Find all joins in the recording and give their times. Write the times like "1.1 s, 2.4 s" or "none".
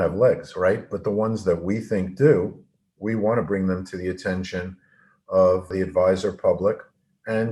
5.7 s